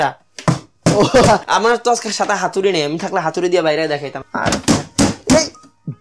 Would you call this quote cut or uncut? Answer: cut